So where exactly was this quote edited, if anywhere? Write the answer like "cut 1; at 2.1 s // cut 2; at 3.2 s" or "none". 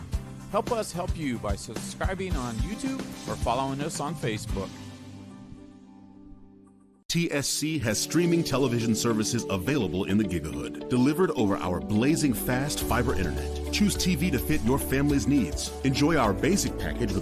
cut 1; at 7.1 s